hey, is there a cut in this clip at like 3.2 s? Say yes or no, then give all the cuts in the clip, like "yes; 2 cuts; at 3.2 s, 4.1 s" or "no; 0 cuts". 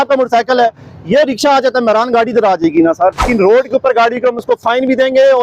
yes; 1 cut; at 3.2 s